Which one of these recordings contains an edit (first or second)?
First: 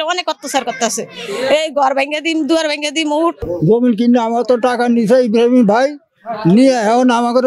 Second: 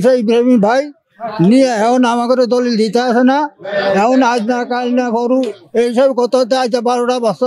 first